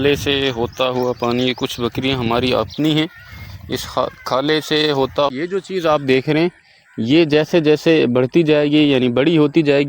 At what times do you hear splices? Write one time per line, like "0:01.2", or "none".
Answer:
0:05.3